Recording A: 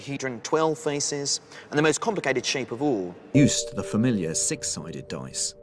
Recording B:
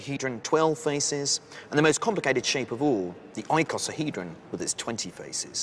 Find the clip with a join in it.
B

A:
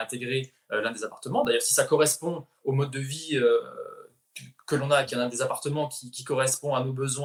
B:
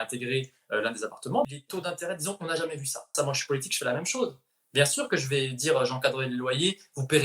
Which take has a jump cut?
B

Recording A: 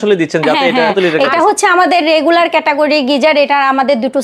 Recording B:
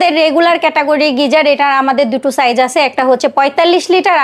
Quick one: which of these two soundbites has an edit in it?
A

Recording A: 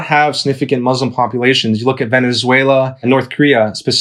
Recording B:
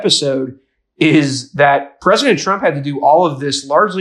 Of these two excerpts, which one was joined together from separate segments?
A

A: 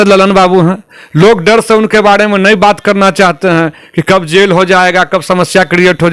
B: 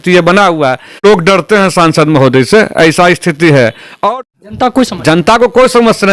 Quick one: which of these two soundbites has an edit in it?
B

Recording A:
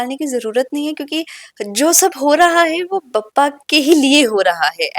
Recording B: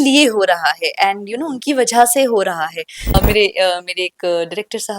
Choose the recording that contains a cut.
B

